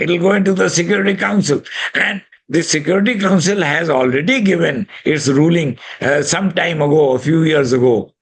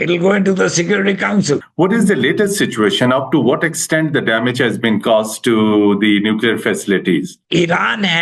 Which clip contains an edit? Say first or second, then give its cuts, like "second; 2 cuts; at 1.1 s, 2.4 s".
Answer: second; 2 cuts; at 1.7 s, 7.4 s